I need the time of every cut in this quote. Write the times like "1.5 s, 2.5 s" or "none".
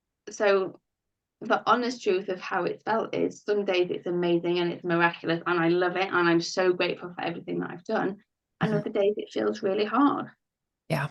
none